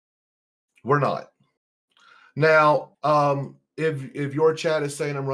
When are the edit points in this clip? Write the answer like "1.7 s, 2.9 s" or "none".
2.9 s